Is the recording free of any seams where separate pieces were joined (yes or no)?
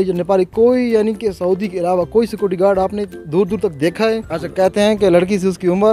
no